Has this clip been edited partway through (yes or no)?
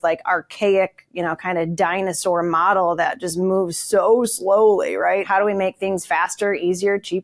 yes